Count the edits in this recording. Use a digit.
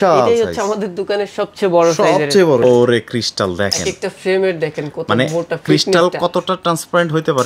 1